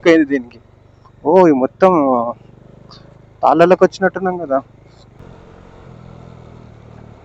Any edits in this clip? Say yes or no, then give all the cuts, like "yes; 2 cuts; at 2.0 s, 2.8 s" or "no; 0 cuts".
yes; 1 cut; at 5.1 s